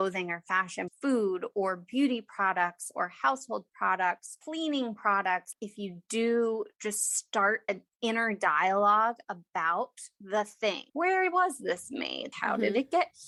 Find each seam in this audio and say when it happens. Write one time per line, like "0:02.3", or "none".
none